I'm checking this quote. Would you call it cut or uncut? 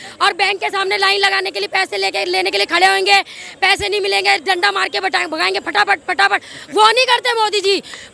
uncut